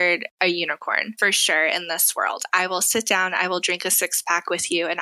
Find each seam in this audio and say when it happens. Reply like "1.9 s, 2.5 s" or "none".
1.1 s